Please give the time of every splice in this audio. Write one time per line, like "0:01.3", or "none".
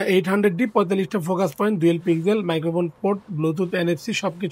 none